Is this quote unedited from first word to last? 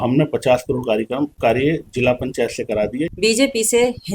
no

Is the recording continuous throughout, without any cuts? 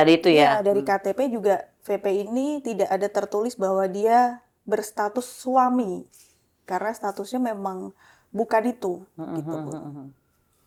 yes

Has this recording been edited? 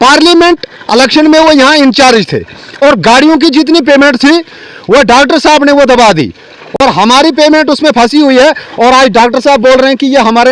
no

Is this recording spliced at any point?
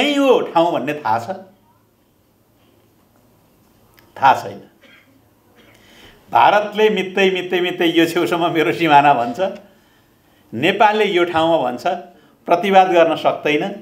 no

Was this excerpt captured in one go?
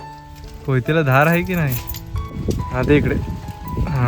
yes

